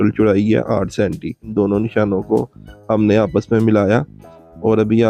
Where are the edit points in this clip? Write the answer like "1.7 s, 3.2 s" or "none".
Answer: 1.5 s